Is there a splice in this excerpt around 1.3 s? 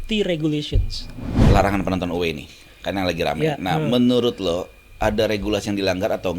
yes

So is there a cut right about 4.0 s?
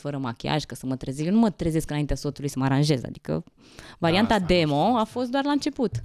no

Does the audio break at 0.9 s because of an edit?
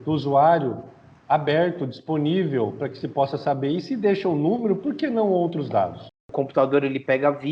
no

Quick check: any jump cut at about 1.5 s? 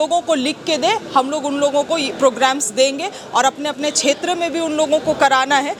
no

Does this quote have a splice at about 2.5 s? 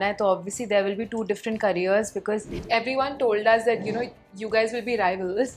yes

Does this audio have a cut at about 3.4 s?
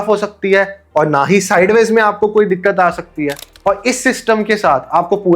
yes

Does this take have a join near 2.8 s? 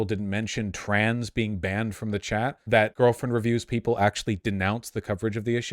yes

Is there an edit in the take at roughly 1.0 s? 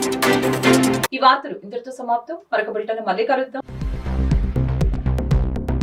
no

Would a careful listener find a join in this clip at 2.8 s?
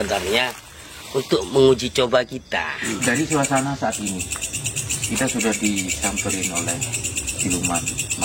yes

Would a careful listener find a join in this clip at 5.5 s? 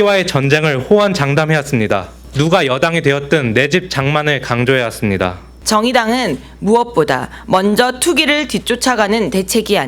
yes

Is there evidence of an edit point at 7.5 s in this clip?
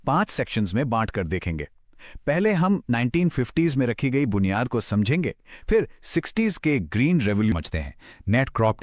yes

